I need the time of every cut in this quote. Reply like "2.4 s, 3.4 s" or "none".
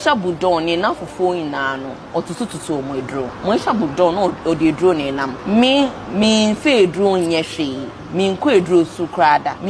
3.3 s, 5.4 s